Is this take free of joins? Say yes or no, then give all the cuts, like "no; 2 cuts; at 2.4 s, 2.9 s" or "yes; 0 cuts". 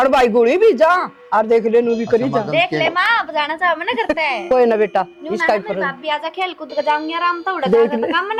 yes; 0 cuts